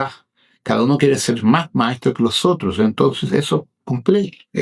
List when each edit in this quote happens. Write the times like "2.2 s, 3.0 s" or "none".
none

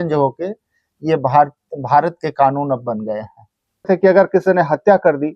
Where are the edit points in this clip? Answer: 3.9 s

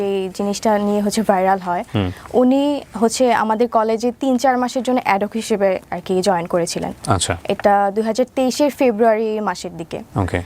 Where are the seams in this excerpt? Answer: none

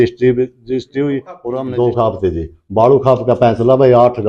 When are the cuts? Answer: 1.3 s

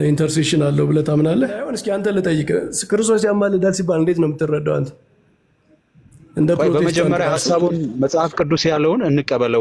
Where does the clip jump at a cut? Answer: 1.8 s

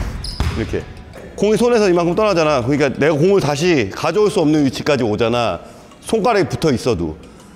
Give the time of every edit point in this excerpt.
1.0 s

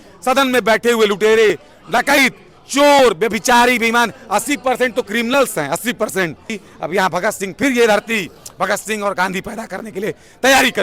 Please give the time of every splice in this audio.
6.6 s

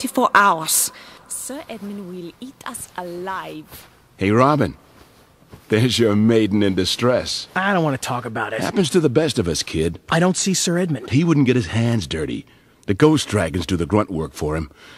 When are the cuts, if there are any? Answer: 10.6 s

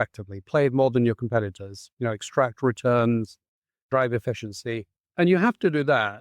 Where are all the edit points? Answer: 5.0 s

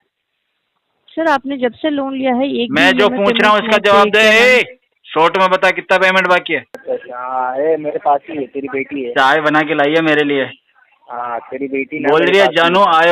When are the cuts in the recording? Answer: 6.7 s

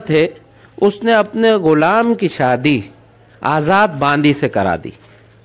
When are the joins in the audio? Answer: none

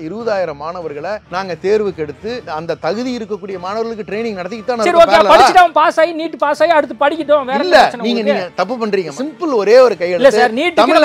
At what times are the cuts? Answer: 1.2 s, 9.1 s

